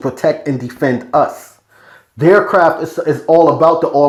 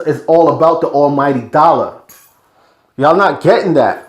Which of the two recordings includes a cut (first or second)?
second